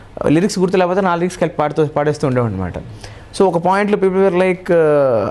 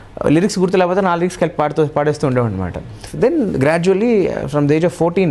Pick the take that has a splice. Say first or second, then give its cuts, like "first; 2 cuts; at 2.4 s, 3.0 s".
second; 1 cut; at 3.0 s